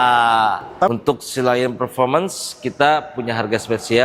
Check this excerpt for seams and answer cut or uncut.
cut